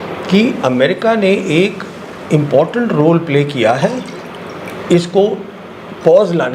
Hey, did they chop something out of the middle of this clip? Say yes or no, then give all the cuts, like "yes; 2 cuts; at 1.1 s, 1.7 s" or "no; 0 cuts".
no; 0 cuts